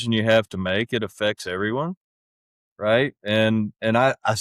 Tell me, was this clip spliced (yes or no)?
no